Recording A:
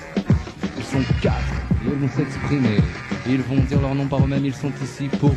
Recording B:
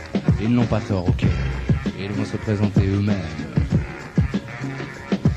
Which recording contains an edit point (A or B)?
A